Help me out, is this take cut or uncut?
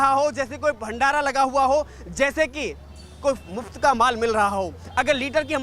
uncut